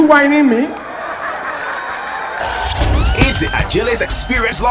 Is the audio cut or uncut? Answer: cut